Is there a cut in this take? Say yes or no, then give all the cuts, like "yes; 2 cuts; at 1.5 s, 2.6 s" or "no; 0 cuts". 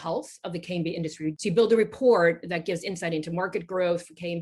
yes; 1 cut; at 1.3 s